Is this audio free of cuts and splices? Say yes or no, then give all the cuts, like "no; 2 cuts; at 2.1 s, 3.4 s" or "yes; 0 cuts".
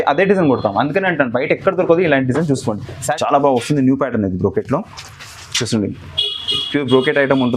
no; 1 cut; at 3.1 s